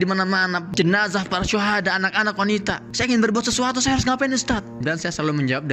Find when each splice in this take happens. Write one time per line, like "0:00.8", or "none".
0:04.8